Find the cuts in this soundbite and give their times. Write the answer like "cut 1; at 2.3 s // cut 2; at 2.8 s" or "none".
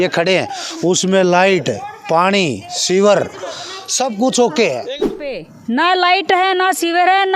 cut 1; at 5.4 s